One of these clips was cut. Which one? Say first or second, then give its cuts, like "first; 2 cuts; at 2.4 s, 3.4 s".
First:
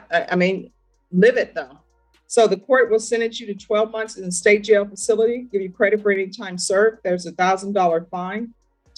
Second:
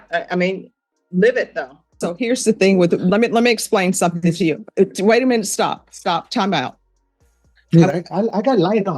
second; 1 cut; at 1.9 s